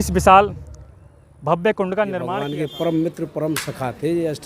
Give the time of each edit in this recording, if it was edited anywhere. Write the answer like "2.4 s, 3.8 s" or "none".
2.4 s